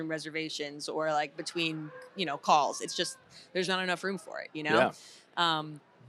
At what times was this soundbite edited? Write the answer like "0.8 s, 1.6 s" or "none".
none